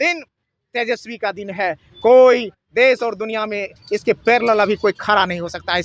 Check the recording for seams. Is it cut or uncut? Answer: uncut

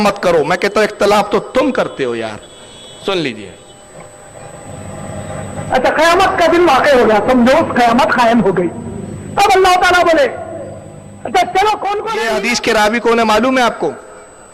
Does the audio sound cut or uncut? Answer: cut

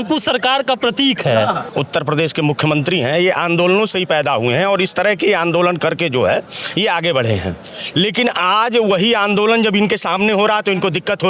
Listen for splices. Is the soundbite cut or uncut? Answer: cut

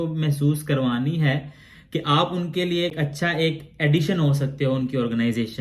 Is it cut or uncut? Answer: cut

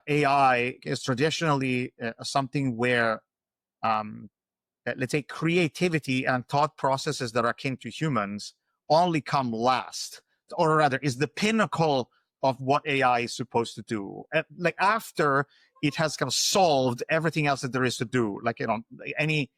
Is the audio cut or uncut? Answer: uncut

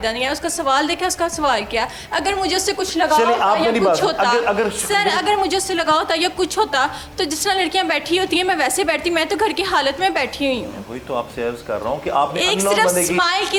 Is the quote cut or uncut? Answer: uncut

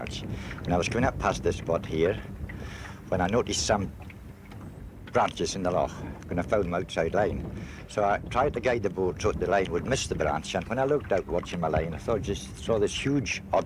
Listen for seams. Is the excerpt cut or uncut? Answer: uncut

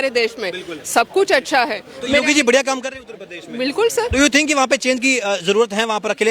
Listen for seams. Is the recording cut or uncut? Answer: uncut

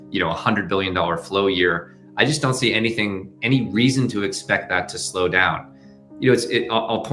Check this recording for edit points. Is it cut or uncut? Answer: uncut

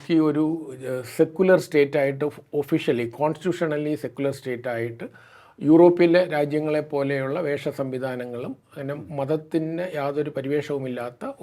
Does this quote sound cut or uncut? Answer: uncut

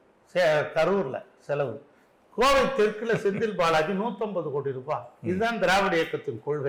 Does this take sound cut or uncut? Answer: uncut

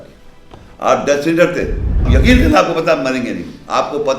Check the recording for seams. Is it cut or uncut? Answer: cut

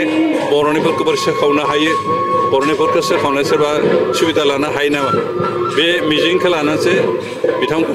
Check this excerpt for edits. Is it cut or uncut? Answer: uncut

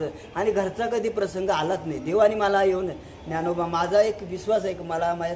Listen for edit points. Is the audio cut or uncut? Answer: uncut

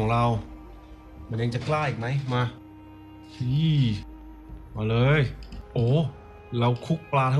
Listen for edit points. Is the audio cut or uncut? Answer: uncut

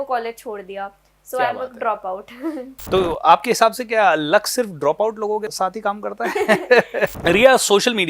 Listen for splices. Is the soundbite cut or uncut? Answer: cut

